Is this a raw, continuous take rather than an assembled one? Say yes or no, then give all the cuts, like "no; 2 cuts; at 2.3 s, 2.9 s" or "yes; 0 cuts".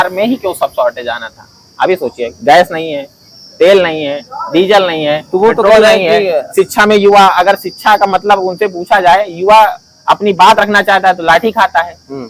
yes; 0 cuts